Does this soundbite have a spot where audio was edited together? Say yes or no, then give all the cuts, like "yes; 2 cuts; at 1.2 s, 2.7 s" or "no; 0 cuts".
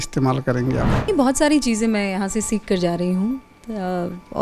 yes; 1 cut; at 1.1 s